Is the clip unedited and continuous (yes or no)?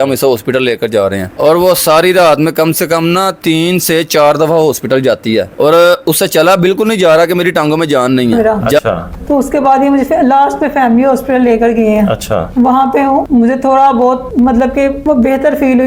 yes